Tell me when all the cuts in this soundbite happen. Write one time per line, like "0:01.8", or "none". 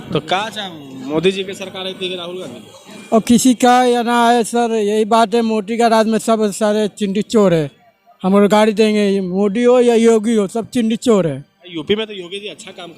none